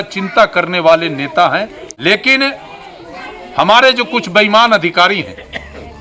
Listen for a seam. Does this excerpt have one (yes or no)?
yes